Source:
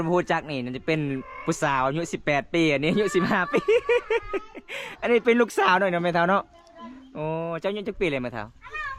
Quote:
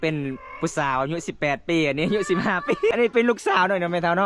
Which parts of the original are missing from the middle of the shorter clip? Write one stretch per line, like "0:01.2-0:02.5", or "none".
0:03.8-0:05.0